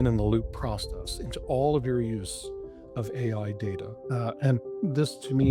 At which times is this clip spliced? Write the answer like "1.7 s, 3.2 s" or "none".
3.9 s